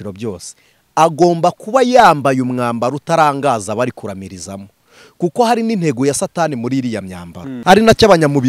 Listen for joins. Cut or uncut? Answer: cut